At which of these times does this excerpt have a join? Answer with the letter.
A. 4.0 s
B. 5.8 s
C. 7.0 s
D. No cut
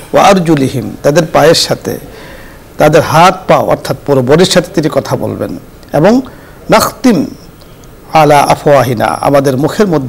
D